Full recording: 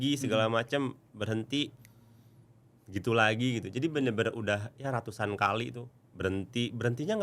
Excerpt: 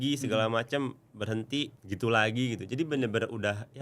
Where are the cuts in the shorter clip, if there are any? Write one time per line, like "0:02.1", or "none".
0:01.8